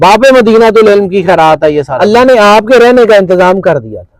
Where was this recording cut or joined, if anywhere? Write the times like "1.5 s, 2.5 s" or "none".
1.9 s